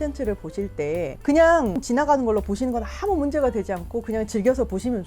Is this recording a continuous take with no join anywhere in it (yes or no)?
no